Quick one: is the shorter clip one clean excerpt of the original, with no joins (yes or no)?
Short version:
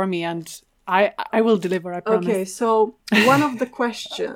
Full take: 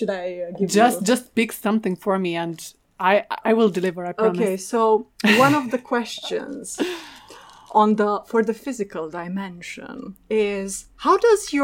yes